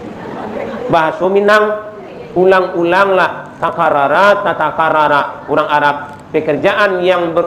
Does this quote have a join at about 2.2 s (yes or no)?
no